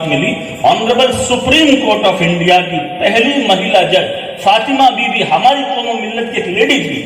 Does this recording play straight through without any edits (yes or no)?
yes